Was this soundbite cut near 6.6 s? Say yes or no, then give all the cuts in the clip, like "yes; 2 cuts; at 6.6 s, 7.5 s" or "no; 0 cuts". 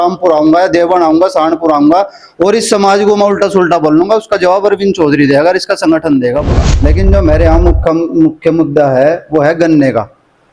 yes; 1 cut; at 6.6 s